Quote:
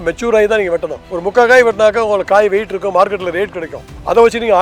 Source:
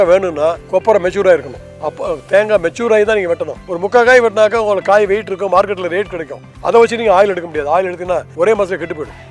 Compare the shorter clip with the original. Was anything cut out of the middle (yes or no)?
no